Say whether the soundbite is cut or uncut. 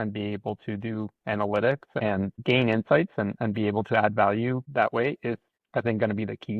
cut